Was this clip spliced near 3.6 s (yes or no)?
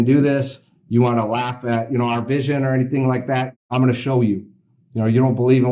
yes